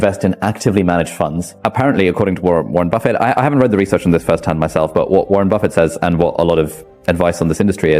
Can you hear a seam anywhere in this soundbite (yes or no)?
yes